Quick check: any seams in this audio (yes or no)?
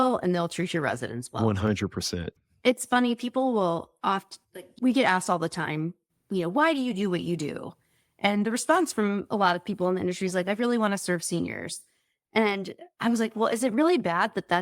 yes